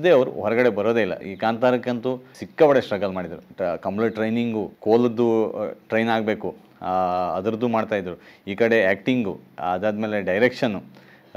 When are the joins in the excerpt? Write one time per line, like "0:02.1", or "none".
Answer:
0:01.3
0:02.4
0:03.4
0:04.7